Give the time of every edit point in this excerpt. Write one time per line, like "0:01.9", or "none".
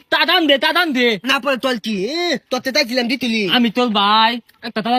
none

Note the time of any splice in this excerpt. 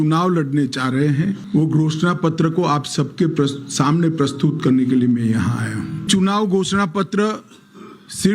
0:01.4
0:06.1

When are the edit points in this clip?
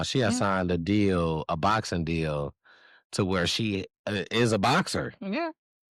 none

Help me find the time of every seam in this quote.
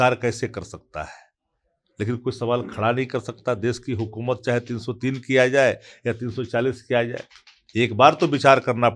none

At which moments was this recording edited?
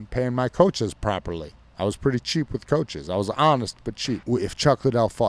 0:04.2

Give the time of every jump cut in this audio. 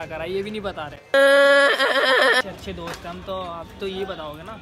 0:02.4

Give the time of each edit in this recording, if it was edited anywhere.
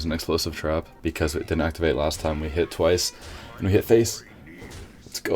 0:00.9

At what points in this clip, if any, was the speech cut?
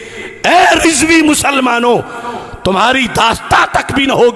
none

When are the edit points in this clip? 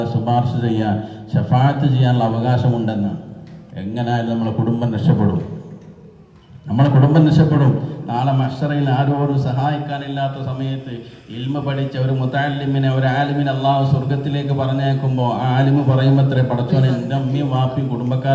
none

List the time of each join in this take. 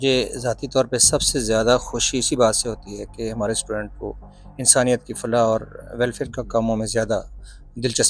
none

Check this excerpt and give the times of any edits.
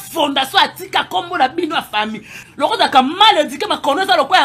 0:02.3

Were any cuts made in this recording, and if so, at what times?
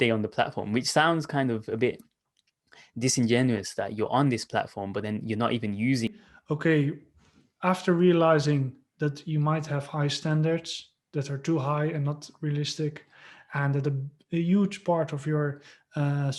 0:06.1

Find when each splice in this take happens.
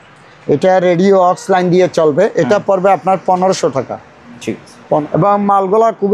0:05.0

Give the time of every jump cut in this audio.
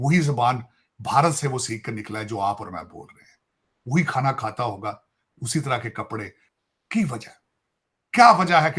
0:06.4

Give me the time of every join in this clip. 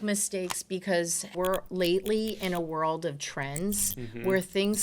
0:01.3

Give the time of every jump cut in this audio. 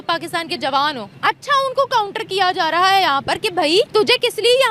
0:01.1
0:03.7

